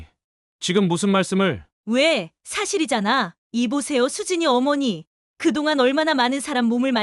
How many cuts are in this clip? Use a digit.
1